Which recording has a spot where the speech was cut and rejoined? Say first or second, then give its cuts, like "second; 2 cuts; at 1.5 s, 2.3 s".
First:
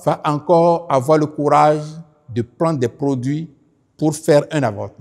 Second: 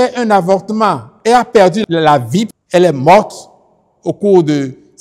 second; 1 cut; at 2.6 s